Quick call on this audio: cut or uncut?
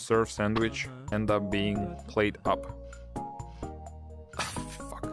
cut